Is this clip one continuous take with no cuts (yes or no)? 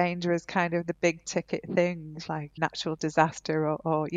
no